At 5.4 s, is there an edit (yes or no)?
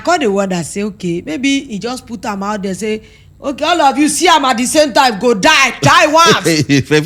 no